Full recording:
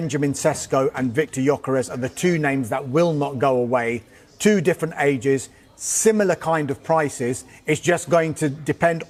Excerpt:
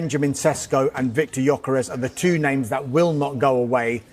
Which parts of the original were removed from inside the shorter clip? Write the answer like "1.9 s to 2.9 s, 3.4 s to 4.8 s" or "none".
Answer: none